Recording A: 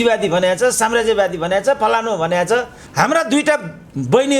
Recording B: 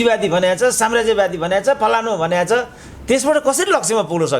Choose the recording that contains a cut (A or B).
A